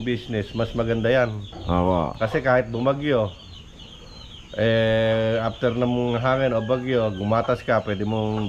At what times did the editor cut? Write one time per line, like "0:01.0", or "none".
none

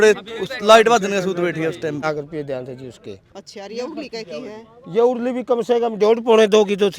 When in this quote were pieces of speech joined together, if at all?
0:02.0

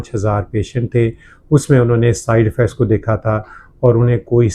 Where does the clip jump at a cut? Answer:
none

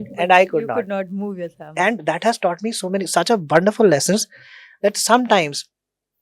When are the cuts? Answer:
none

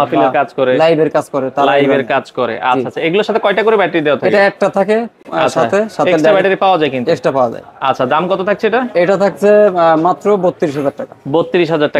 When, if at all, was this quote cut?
none

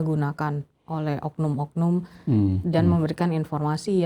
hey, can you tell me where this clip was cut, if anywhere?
none

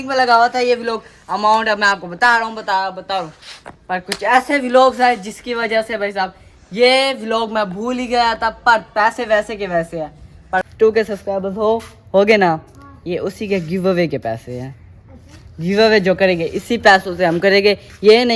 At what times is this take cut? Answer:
0:10.7

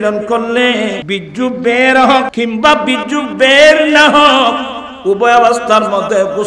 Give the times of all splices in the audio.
0:01.0
0:02.3

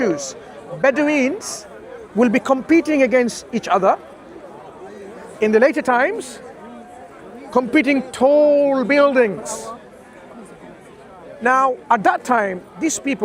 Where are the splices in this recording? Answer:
none

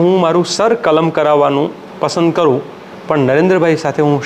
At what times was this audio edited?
none

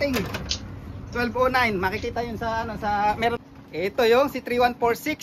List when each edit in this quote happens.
0:03.4

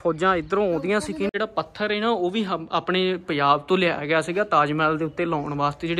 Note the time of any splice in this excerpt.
0:01.3

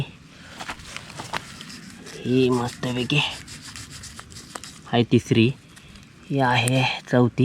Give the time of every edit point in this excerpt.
none

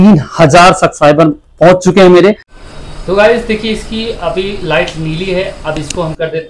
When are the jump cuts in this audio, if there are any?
0:02.5

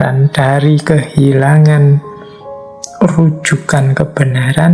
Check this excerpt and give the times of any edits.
none

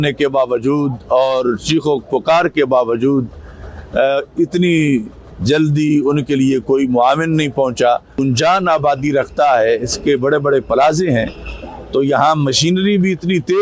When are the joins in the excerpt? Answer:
0:08.2

